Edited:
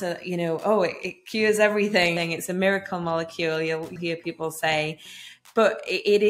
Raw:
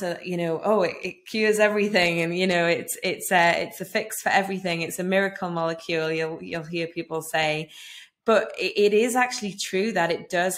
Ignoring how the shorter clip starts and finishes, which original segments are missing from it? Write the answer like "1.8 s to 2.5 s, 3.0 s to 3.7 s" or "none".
2.1 s to 4.6 s, 6.4 s to 6.7 s